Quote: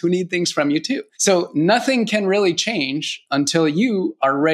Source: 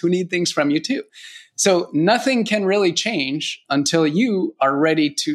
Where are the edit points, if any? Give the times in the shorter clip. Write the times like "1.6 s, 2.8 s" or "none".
1.1 s